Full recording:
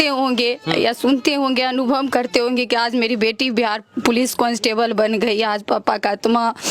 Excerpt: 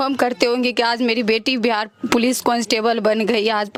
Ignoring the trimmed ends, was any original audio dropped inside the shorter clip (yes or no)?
no